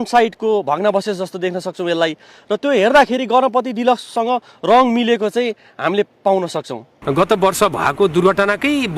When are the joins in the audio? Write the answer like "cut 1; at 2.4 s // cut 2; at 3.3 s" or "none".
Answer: cut 1; at 6.8 s